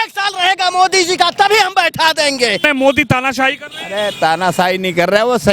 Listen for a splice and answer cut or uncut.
cut